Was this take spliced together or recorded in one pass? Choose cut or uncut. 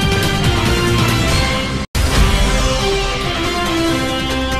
cut